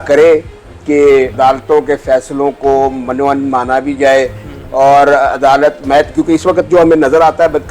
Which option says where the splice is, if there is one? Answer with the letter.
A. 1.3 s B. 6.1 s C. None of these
A